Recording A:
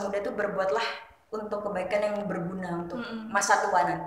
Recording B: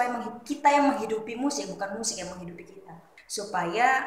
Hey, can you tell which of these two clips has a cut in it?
B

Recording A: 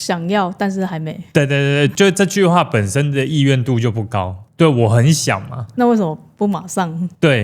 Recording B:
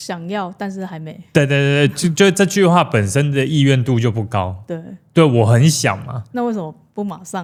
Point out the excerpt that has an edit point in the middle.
A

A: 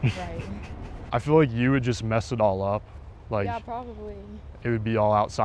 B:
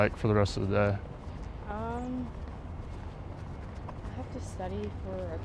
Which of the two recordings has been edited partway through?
A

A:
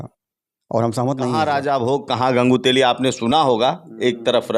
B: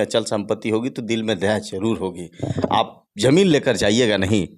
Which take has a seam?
A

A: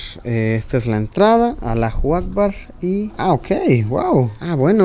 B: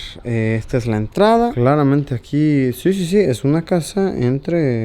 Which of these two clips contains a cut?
B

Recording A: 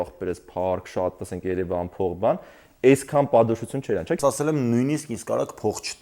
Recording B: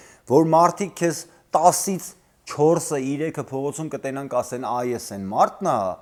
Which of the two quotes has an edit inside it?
A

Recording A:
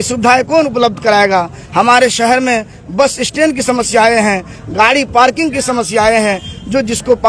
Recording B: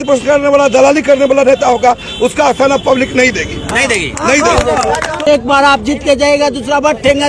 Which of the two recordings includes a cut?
B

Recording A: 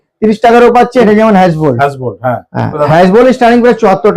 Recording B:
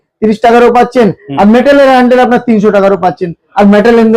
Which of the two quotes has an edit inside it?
A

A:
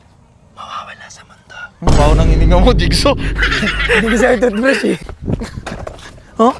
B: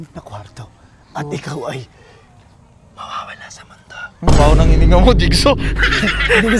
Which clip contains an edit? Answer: A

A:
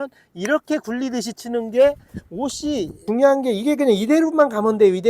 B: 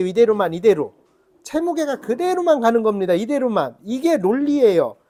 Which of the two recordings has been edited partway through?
A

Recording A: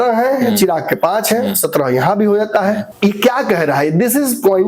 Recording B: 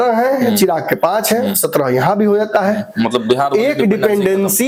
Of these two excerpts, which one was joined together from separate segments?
A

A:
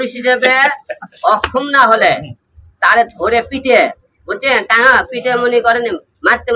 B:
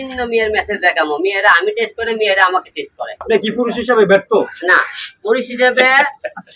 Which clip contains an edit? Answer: B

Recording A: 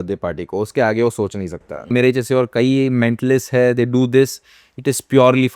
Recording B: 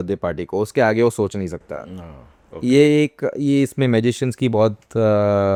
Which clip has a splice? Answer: A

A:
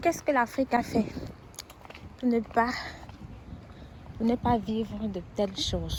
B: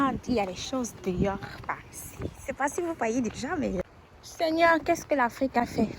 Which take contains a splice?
B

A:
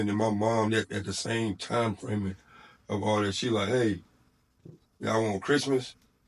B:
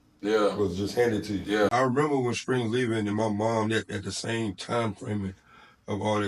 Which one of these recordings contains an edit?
B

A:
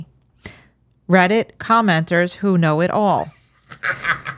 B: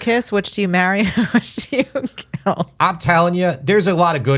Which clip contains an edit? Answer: B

